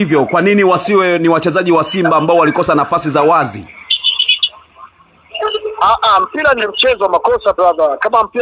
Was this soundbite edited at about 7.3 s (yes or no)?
no